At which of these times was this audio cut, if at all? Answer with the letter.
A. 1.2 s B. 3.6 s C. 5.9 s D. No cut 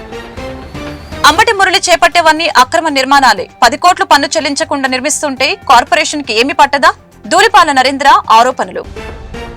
A